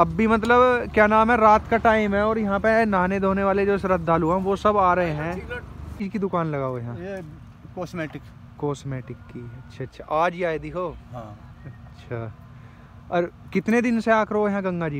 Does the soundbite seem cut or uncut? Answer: cut